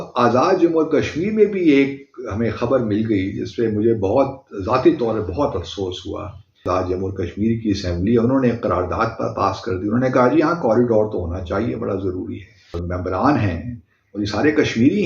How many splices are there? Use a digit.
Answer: 2